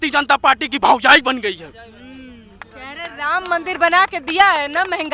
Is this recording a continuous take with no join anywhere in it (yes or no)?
yes